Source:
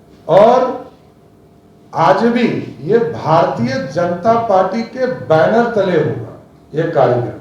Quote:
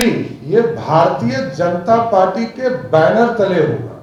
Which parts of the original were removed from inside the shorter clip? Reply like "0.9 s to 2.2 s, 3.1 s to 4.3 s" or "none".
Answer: none